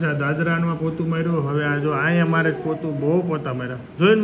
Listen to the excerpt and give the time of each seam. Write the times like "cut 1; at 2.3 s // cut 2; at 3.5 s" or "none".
none